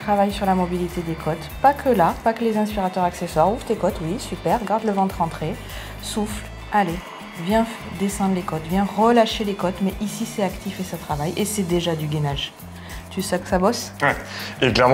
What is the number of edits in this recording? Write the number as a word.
zero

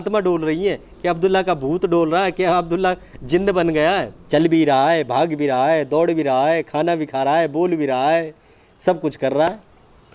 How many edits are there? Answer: one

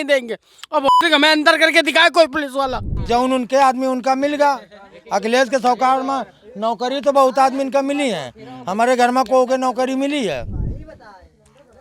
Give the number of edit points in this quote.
one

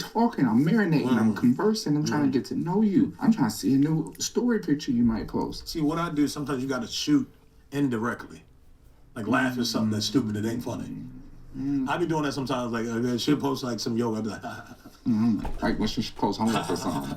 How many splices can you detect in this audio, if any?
one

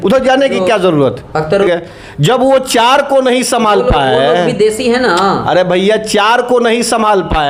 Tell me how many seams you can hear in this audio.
zero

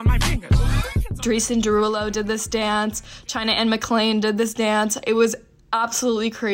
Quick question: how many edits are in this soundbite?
one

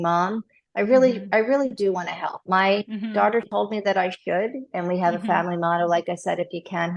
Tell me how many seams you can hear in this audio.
one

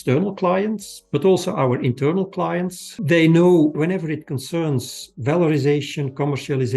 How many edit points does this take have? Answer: two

